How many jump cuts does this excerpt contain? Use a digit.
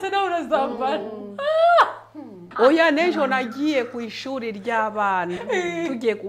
1